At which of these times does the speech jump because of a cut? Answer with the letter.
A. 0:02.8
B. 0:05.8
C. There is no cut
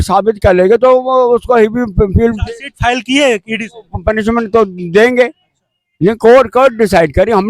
C